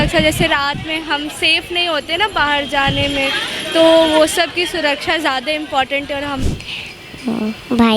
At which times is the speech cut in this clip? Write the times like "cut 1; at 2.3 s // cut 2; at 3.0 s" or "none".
cut 1; at 6.4 s